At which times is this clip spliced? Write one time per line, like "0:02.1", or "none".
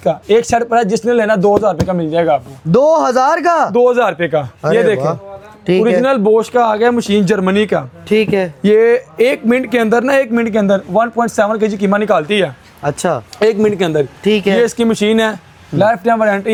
none

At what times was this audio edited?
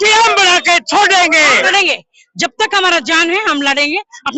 0:01.6

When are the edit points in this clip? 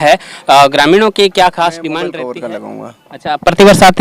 0:02.1

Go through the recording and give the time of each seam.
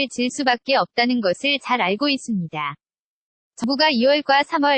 0:03.6

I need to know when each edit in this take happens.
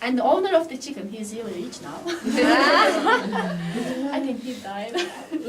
0:01.5

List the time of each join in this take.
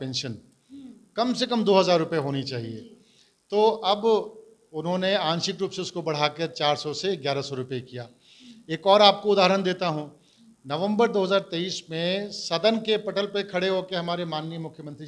none

